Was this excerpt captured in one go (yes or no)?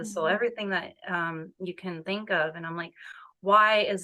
yes